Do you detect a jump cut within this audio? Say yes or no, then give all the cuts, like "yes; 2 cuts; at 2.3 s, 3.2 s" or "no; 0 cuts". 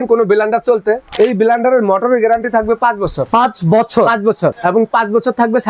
yes; 3 cuts; at 1.1 s, 3.2 s, 4.6 s